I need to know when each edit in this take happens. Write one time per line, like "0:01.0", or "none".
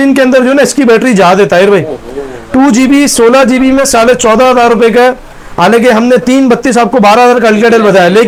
none